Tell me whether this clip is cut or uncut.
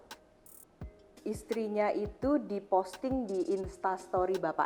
uncut